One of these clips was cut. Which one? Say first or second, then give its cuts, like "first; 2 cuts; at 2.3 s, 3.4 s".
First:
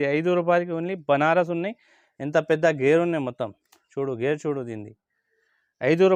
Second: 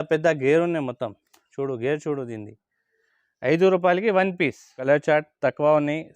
second; 1 cut; at 4.8 s